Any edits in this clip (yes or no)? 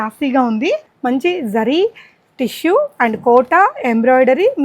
yes